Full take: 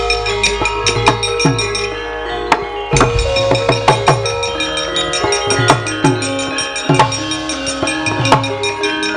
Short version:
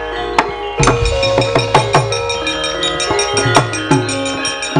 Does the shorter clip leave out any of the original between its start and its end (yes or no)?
no